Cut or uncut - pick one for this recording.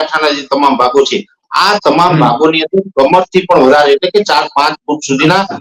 uncut